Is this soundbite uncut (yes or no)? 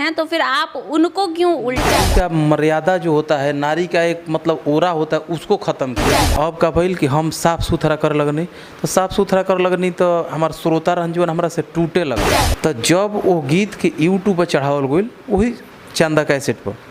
no